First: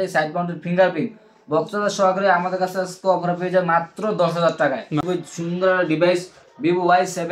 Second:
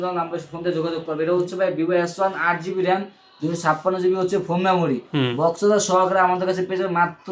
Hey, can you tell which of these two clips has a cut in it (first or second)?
first